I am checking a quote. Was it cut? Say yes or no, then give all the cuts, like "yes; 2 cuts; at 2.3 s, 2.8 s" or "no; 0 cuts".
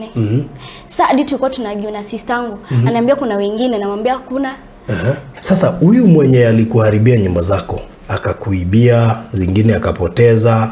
yes; 1 cut; at 5.3 s